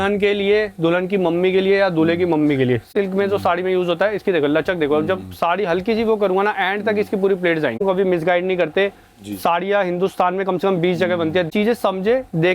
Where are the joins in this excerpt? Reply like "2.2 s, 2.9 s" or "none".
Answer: 2.9 s, 7.8 s, 11.5 s